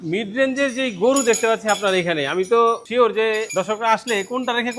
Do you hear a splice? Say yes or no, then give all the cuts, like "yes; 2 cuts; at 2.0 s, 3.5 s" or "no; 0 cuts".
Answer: no; 0 cuts